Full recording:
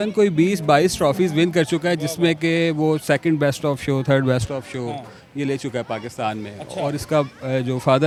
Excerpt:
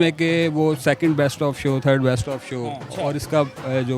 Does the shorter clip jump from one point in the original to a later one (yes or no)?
yes